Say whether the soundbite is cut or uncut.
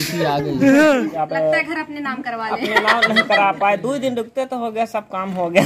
cut